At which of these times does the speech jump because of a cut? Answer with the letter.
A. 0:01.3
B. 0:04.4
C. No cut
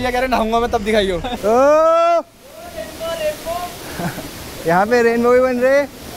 A